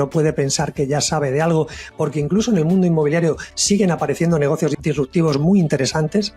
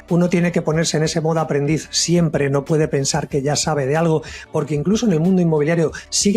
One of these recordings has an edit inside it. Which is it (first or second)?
first